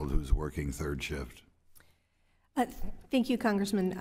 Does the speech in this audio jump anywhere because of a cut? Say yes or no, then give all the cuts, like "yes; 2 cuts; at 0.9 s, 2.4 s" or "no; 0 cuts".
no; 0 cuts